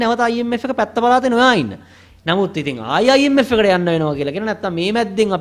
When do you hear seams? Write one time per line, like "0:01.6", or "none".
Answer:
none